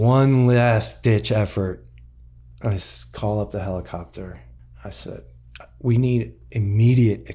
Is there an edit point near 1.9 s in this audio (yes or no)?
no